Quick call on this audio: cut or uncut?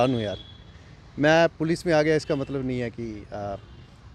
uncut